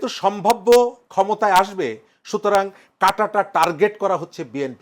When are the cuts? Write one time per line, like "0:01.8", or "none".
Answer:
none